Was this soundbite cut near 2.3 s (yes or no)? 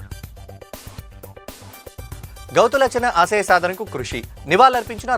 no